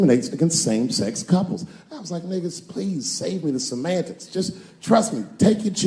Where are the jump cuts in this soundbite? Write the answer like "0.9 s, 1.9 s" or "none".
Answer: none